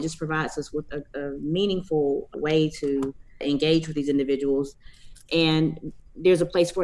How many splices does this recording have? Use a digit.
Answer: 4